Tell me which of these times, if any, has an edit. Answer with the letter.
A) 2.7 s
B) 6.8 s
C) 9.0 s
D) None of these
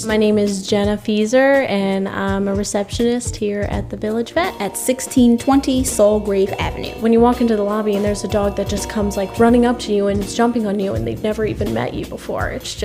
B